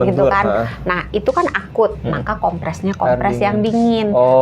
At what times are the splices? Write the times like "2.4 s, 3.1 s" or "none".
none